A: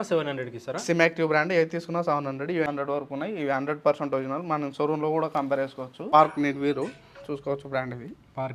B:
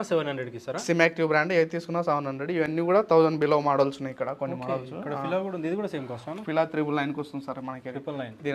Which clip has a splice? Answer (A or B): A